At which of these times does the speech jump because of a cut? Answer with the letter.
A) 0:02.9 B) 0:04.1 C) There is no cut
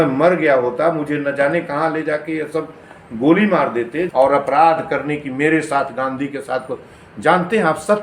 B